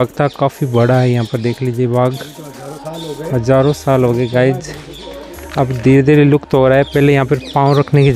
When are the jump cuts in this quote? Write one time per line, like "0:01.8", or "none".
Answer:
none